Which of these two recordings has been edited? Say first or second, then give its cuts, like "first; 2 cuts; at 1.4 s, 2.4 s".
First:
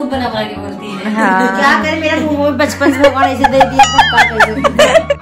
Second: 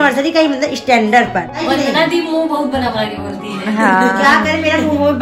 second; 1 cut; at 1.6 s